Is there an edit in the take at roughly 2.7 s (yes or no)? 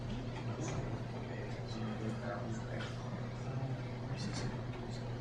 yes